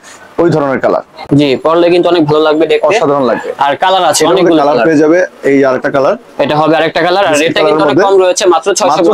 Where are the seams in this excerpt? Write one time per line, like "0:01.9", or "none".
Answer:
none